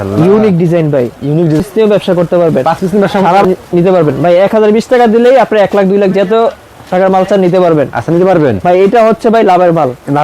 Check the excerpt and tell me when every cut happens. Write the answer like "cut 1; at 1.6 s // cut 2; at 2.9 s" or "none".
cut 1; at 1.6 s // cut 2; at 3.4 s